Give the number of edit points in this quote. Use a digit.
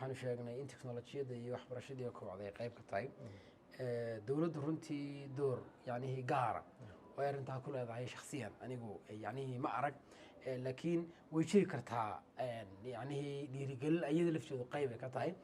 0